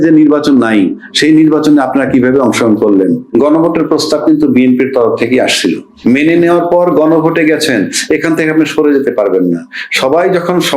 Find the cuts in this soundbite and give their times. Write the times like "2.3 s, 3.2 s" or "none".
3.2 s, 5.9 s